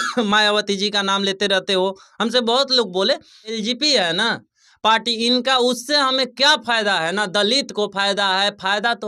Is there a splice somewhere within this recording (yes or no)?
yes